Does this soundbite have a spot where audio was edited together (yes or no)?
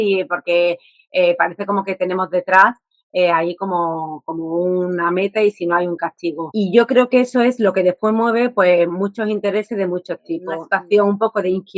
yes